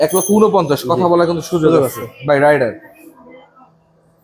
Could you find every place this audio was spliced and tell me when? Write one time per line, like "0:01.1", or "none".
none